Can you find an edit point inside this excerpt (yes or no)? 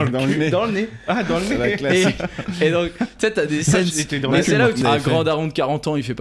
yes